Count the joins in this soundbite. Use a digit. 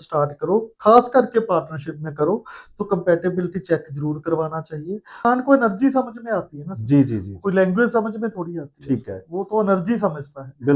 1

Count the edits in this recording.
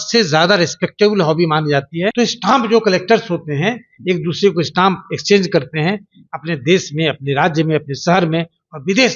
1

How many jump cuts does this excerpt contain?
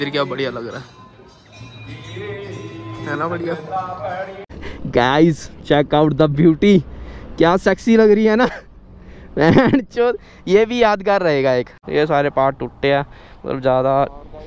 2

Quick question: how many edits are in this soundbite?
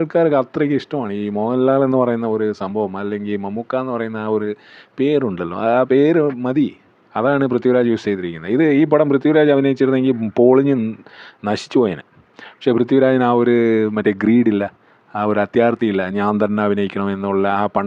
0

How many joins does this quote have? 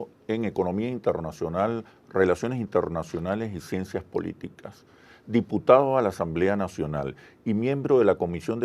1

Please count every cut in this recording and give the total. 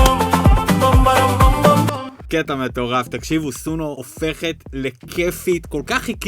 2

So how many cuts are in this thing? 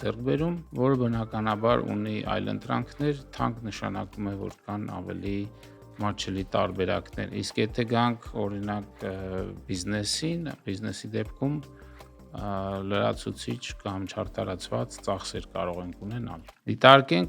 0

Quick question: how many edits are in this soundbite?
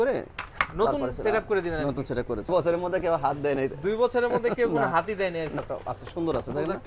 2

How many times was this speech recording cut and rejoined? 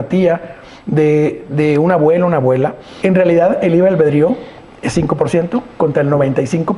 1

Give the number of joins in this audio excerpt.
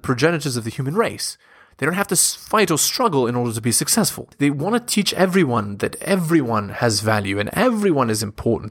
1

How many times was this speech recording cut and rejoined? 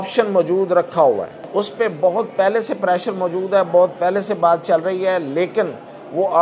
1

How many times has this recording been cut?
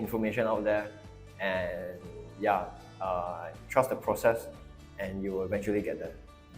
0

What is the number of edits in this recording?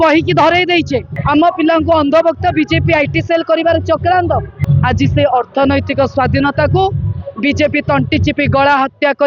2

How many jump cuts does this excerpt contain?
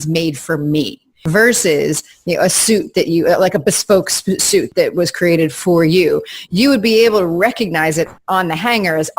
3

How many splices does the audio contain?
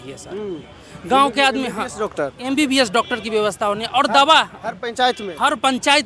0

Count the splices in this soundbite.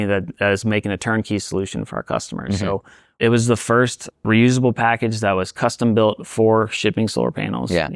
2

